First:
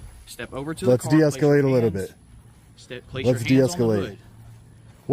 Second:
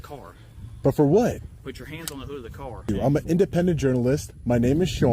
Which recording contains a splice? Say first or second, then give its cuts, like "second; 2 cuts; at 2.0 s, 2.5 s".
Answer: second; 1 cut; at 2.9 s